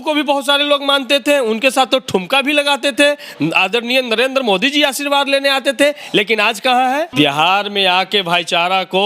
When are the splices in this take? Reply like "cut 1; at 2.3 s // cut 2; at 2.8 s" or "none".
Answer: cut 1; at 7.1 s